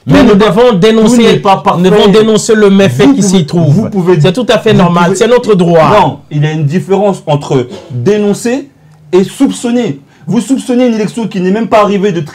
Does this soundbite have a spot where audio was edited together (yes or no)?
no